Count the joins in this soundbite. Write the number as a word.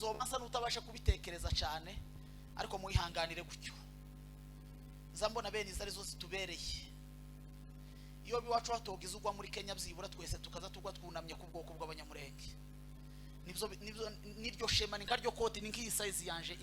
zero